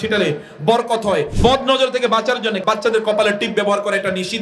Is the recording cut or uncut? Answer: cut